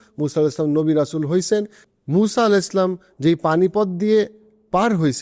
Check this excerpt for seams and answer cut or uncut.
cut